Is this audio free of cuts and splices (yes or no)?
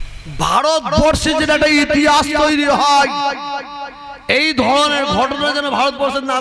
yes